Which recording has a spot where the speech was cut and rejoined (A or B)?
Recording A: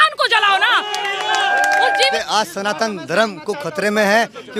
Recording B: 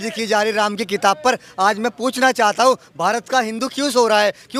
A